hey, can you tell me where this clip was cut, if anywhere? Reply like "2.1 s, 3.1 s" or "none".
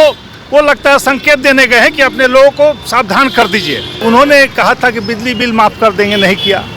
4.0 s

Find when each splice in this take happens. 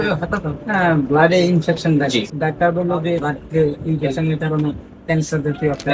2.3 s, 3.3 s

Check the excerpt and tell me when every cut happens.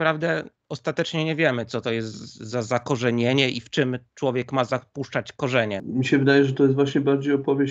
5.8 s

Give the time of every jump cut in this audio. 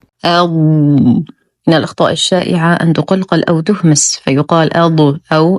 none

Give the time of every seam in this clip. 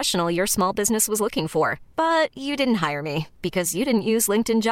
none

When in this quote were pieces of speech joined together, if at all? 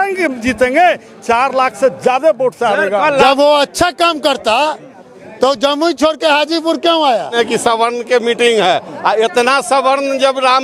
3.2 s, 7.3 s

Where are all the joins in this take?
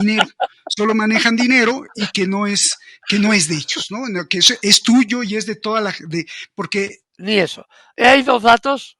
7.1 s

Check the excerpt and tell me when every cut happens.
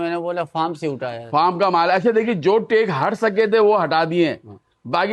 none

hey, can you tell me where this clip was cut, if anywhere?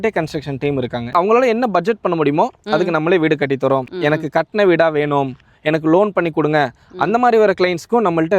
1.1 s, 3.9 s

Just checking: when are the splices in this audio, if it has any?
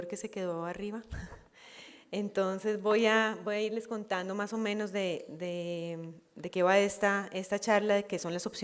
5.3 s

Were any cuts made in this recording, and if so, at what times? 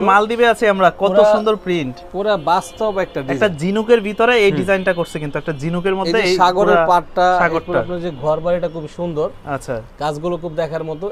none

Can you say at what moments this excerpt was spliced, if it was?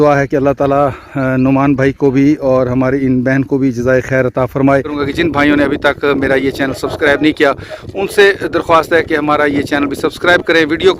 5.0 s

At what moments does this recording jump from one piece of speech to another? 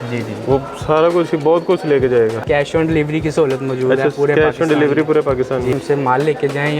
2.4 s, 5.7 s

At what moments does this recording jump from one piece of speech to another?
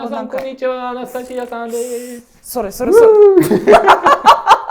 none

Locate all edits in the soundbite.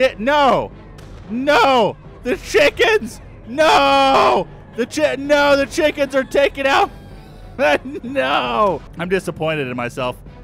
8.9 s

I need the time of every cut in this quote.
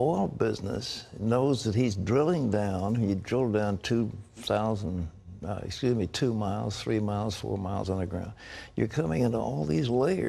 none

